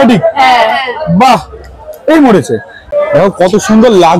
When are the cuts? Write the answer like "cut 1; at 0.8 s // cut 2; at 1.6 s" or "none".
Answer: cut 1; at 2.9 s